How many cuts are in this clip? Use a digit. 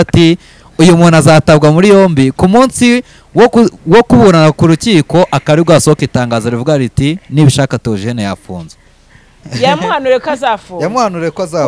1